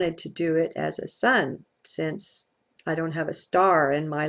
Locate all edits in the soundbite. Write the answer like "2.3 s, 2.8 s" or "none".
1.0 s